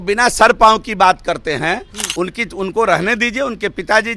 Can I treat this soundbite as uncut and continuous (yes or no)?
no